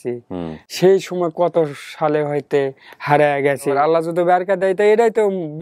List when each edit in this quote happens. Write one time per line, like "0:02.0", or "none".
0:03.7